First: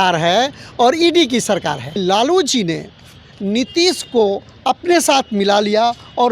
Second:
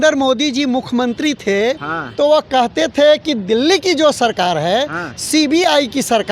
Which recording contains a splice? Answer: first; 1 cut; at 1.9 s

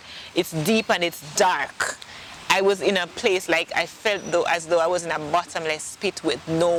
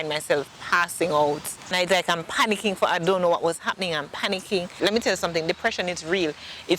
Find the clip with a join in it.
second; 2 cuts; at 1.7 s, 4.7 s

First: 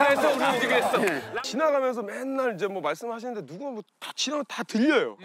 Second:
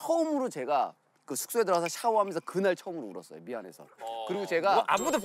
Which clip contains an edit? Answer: first; 1 cut; at 1.2 s

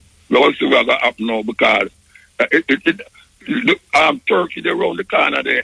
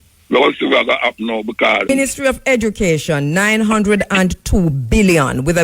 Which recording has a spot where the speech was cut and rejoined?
second; 1 cut; at 1.9 s

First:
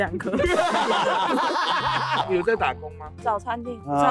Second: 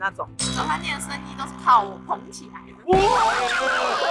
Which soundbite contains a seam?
first; 1 cut; at 2.3 s

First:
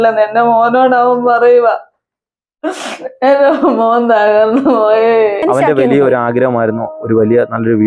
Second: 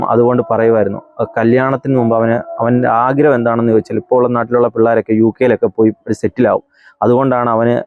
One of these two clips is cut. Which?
first; 1 cut; at 5.4 s

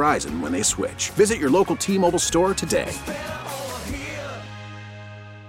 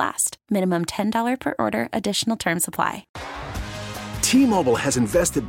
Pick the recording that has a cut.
second; 1 cut; at 3.2 s

